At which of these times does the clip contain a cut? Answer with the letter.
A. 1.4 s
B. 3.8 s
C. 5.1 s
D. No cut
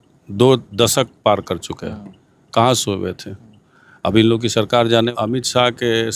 C